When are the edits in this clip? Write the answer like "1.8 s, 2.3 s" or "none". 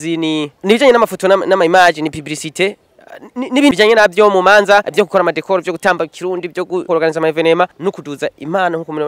3.7 s, 4.9 s, 6.9 s, 7.8 s